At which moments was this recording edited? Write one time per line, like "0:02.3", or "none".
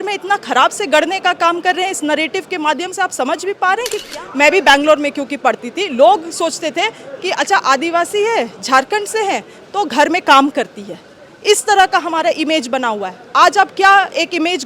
0:04.0